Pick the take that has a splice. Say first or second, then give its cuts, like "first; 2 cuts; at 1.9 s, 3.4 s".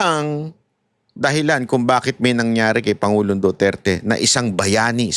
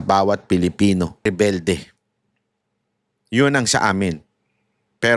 second; 1 cut; at 1.2 s